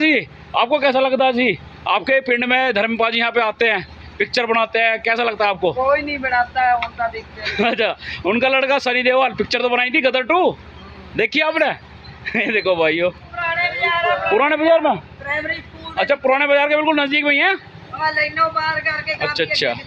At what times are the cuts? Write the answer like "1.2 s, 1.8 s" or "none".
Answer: 13.4 s